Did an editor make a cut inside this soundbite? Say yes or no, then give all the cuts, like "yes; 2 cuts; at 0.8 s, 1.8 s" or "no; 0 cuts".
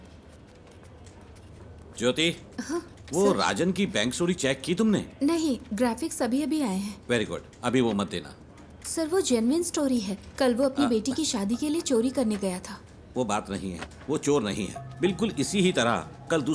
no; 0 cuts